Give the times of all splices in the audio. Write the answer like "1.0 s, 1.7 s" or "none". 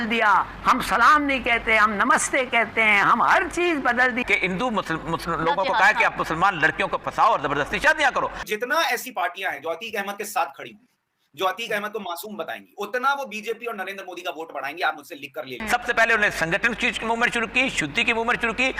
4.2 s, 8.4 s, 15.6 s